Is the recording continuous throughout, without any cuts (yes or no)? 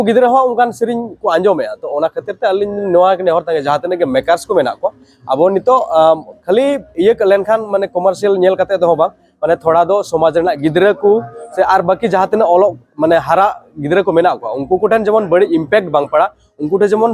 yes